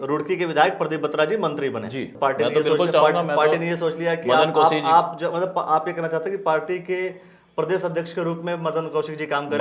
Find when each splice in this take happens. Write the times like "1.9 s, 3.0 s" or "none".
2.1 s